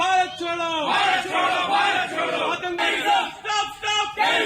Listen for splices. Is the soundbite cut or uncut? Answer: cut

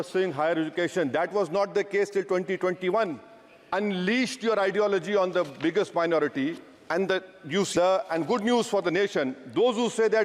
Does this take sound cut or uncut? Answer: cut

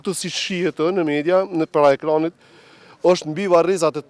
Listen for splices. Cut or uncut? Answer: uncut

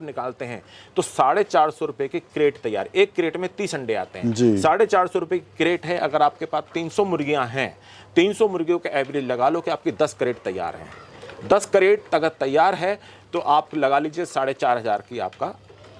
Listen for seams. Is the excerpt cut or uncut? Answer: uncut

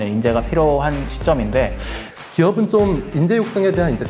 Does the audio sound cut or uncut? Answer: cut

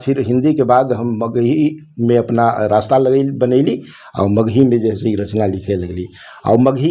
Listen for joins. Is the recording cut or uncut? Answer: uncut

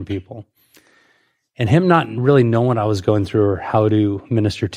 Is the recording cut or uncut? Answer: uncut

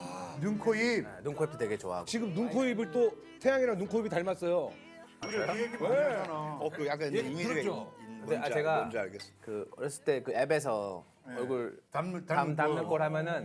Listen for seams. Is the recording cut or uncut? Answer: uncut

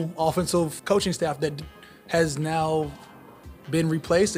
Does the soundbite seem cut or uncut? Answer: uncut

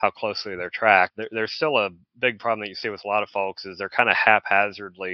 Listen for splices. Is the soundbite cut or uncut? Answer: cut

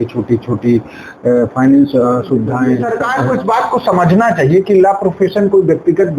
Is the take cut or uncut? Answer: cut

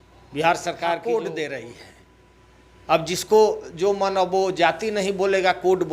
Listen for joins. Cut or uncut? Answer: cut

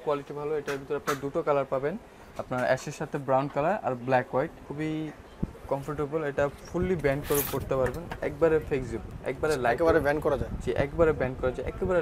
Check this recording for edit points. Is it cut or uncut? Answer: cut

